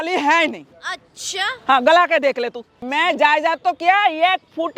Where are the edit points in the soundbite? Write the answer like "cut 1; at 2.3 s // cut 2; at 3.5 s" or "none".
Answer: cut 1; at 2.8 s